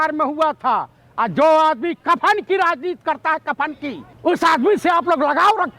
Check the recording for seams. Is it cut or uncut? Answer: cut